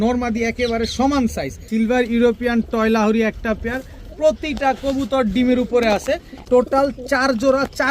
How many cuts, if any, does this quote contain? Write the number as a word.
two